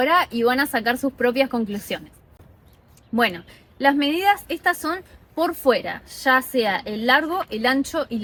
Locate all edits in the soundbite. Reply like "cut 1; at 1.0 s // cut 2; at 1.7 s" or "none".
none